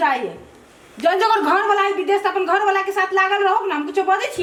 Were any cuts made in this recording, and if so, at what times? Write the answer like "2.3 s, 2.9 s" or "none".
none